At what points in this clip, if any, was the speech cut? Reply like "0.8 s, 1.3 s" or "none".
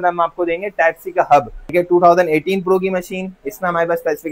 1.6 s